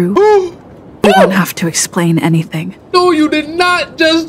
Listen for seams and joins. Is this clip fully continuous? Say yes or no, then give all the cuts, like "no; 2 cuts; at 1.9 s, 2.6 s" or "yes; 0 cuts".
yes; 0 cuts